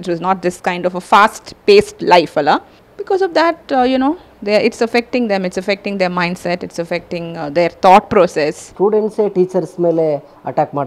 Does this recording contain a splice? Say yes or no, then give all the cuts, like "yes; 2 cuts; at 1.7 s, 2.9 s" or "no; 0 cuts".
yes; 1 cut; at 8.6 s